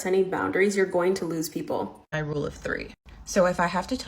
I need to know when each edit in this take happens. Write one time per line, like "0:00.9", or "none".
0:02.1